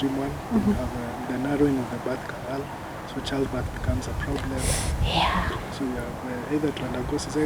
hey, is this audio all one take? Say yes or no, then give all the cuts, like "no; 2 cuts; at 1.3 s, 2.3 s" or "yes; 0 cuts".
yes; 0 cuts